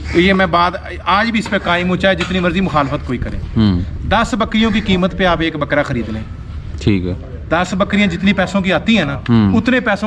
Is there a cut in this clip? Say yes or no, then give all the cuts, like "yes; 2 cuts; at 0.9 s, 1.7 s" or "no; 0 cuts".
no; 0 cuts